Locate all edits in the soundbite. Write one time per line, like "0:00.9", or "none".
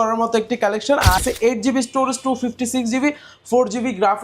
0:01.2